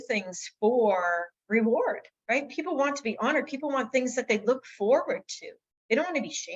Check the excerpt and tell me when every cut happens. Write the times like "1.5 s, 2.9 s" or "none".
1.3 s, 2.1 s